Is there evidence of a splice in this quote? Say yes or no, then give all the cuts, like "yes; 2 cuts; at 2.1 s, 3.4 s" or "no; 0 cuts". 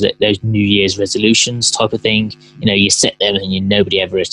no; 0 cuts